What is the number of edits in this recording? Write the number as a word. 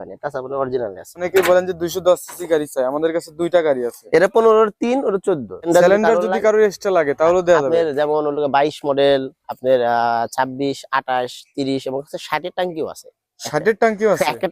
two